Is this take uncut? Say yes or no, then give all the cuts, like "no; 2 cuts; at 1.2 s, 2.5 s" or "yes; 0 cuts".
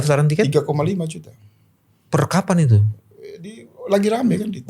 yes; 0 cuts